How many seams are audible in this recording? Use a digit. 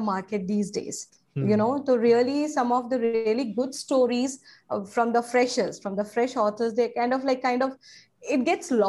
0